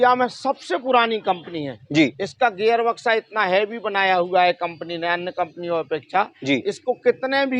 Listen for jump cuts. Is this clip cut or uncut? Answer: uncut